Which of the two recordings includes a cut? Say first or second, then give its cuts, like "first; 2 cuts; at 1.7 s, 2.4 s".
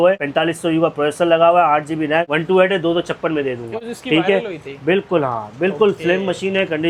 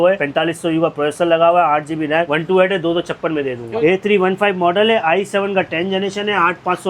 second; 1 cut; at 3.7 s